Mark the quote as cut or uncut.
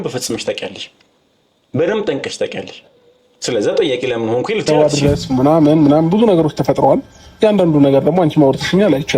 cut